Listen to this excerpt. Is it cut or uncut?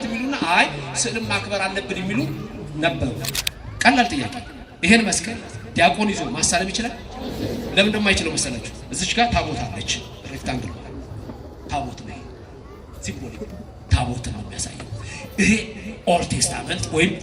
cut